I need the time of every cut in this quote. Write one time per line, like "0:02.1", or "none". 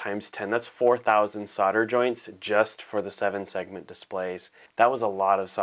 0:04.5